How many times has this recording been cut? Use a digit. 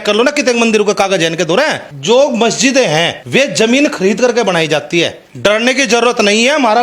3